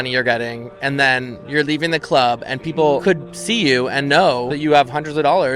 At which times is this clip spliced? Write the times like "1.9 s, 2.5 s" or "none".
3.1 s, 4.5 s